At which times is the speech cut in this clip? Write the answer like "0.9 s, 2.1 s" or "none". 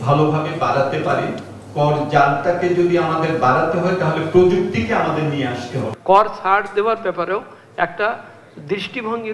5.9 s

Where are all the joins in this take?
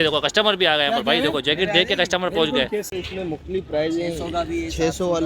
2.9 s

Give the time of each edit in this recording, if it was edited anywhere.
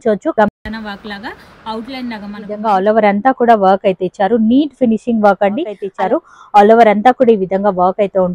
2.6 s, 5.9 s

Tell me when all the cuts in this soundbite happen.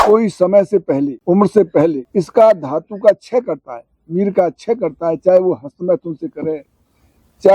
1.2 s, 2.0 s

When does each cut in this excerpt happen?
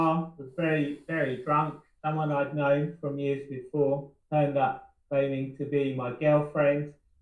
4.1 s

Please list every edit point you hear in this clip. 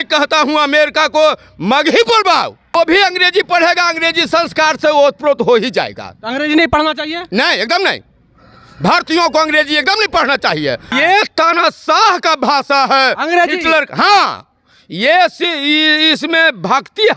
2.6 s, 10.9 s

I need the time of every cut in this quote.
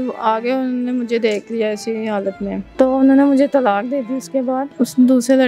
2.6 s, 4.7 s

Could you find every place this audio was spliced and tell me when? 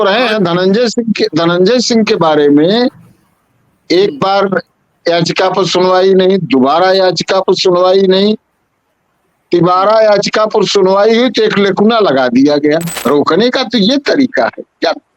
12.9 s

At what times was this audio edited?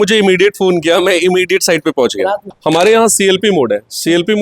2.5 s

